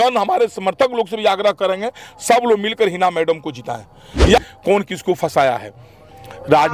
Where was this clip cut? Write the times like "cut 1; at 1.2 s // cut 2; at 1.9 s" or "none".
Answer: cut 1; at 4.4 s